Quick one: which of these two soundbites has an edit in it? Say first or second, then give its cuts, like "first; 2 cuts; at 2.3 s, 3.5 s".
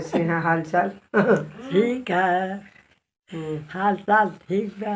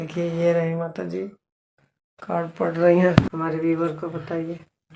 second; 1 cut; at 3.3 s